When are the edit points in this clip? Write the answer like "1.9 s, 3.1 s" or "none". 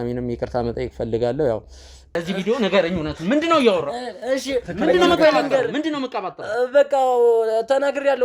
2.2 s

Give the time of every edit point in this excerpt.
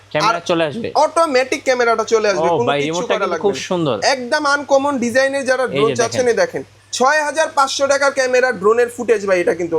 6.7 s

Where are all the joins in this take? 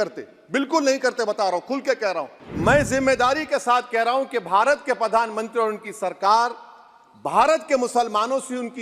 2.4 s

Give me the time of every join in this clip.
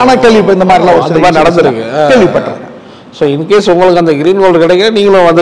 none

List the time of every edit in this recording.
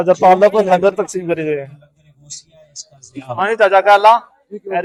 none

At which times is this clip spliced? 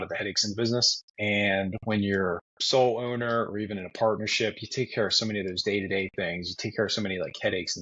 1.0 s, 2.5 s

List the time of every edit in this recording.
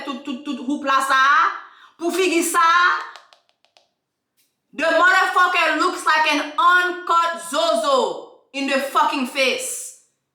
none

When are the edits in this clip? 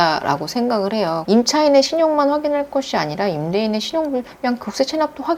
1.2 s

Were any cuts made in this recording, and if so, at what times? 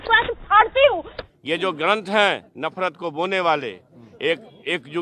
1.1 s

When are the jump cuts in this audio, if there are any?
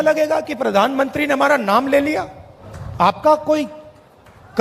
2.5 s

